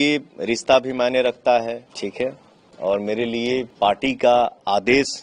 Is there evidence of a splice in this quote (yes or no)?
yes